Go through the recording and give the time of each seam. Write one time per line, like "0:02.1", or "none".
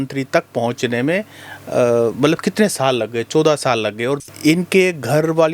0:04.2